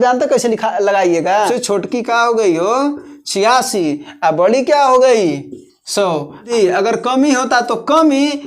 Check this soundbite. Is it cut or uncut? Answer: cut